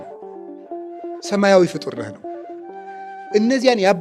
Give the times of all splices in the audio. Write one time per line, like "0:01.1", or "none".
none